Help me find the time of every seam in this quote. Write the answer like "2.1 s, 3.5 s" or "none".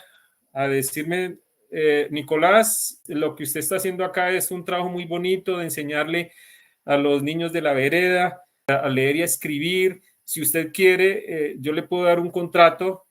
3.0 s, 8.5 s